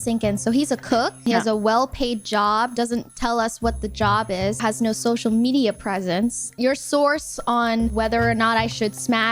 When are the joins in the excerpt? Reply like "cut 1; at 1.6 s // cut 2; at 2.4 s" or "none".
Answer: cut 1; at 1.2 s // cut 2; at 4.6 s